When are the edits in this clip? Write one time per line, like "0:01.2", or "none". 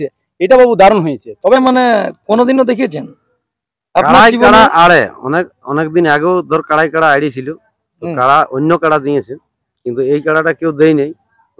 0:01.4